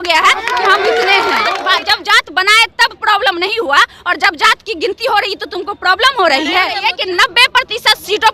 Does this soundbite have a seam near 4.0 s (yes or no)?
no